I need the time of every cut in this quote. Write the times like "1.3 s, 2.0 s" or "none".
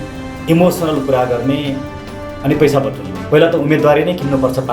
3.1 s